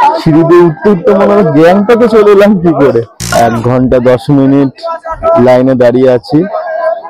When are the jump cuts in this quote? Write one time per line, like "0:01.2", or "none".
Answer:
0:03.2

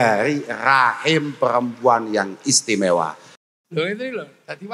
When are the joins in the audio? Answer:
0:03.3

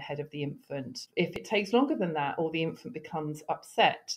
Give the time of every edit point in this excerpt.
0:01.4

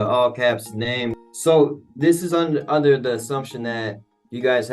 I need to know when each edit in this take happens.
0:01.1

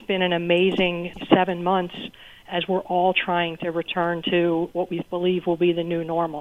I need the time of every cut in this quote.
0:01.1

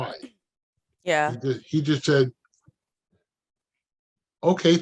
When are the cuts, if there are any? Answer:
none

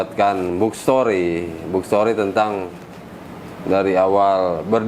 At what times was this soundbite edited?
none

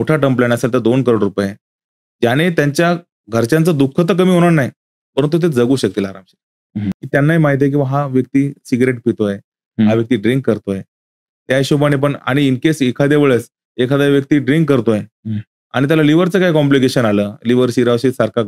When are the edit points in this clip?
0:07.0

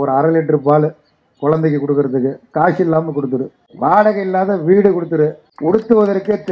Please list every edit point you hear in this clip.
0:03.6
0:05.5

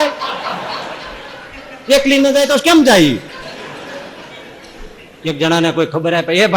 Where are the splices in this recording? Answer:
0:05.3

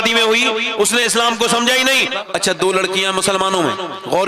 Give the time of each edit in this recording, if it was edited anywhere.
0:02.2

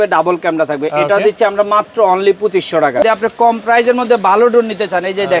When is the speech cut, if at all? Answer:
0:03.0

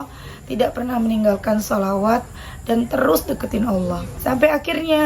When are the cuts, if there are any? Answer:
0:04.1

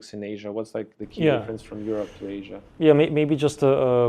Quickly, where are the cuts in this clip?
0:02.7

